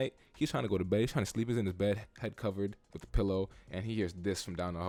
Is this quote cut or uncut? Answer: uncut